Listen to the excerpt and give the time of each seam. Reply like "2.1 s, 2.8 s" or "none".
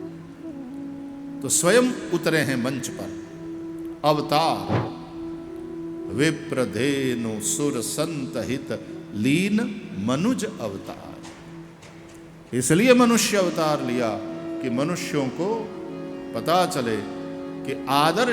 1.2 s